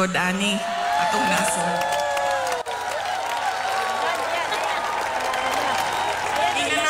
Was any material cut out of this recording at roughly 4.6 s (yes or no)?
no